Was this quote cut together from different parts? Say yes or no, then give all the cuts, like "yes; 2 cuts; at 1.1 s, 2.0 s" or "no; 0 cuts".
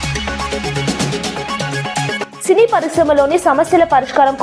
yes; 1 cut; at 2.2 s